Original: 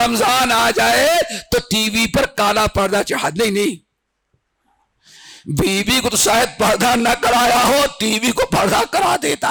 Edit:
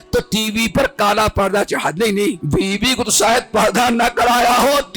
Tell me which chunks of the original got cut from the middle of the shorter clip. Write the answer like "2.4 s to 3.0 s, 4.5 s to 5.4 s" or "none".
3.8 s to 5.5 s